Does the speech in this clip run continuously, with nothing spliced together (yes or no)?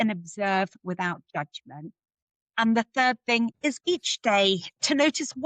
no